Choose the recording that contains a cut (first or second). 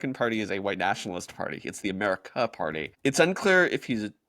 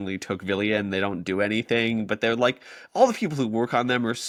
first